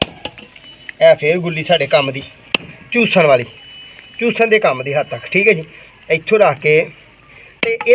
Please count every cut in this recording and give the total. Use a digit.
0